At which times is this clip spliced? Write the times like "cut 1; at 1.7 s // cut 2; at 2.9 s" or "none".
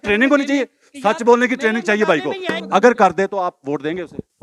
cut 1; at 2.6 s